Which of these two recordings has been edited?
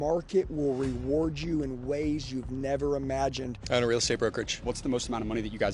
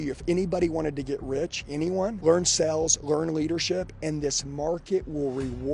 first; 2 cuts; at 3.6 s, 4.5 s

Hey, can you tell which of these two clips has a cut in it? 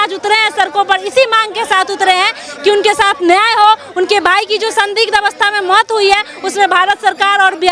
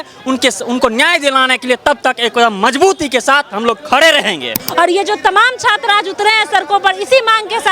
second; 1 cut; at 4.6 s

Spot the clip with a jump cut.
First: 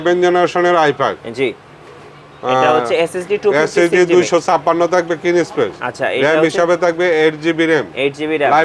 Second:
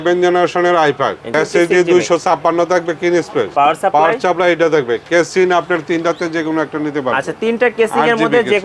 second; 2 cuts; at 1.3 s, 3.5 s

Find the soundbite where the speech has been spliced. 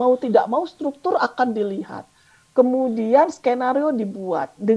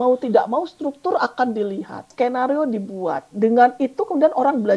second; 1 cut; at 2.1 s

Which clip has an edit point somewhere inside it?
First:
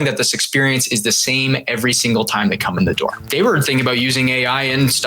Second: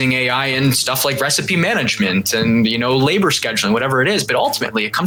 first; 1 cut; at 3.2 s

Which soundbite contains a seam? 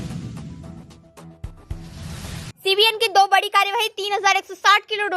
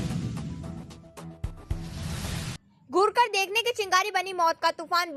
first; 1 cut; at 2.5 s

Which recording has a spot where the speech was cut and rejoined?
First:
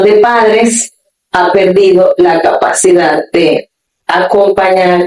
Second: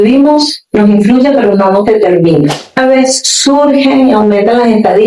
second; 1 cut; at 2.8 s

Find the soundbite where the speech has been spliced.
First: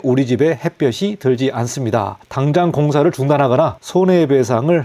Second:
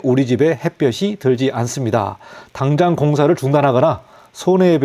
first; 2 cuts; at 2.2 s, 3.8 s

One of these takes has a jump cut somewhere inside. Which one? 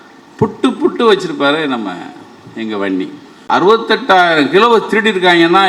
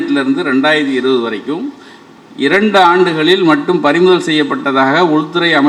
first; 1 cut; at 3.4 s

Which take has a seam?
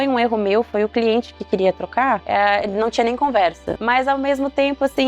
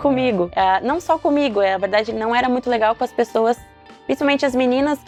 first; 1 cut; at 3.8 s

